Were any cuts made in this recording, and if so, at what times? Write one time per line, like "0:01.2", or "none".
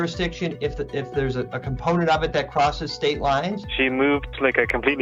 none